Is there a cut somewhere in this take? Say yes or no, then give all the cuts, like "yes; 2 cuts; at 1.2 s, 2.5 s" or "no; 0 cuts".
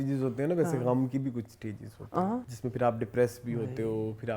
yes; 1 cut; at 2.5 s